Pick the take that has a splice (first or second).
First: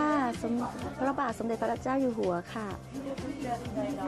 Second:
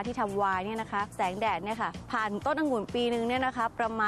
second